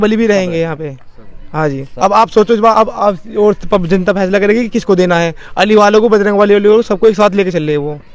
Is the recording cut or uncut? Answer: uncut